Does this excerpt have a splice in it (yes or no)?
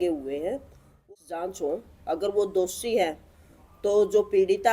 yes